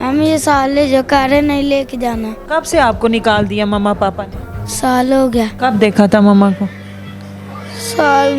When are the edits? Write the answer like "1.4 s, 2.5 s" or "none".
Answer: 2.3 s, 5.5 s